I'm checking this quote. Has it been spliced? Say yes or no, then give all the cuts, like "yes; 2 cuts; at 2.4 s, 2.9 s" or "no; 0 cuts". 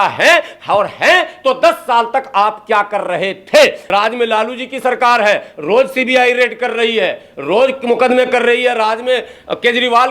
yes; 1 cut; at 3.8 s